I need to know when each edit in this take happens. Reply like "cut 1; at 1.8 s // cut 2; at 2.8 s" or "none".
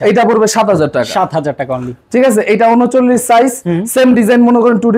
none